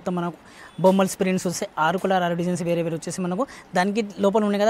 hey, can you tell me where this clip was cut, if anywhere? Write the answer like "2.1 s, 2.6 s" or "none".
none